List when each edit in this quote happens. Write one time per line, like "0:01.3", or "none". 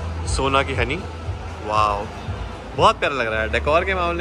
none